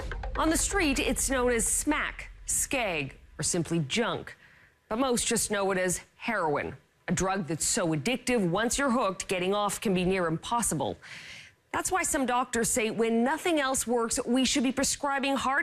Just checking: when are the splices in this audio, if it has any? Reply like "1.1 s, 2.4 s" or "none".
none